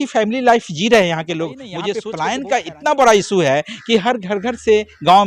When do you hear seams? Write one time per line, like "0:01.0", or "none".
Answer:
0:01.8